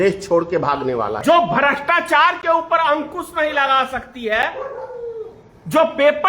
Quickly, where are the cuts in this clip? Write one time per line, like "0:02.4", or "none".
0:01.2